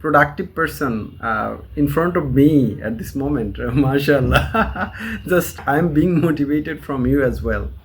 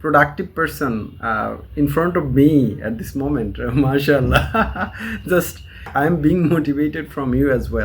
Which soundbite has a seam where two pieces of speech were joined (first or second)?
first